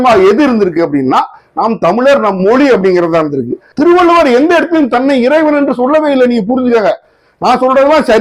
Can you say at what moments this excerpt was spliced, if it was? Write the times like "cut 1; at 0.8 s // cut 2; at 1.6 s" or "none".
cut 1; at 3.6 s